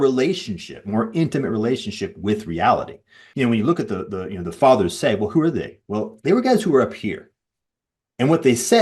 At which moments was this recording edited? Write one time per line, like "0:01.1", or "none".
0:03.3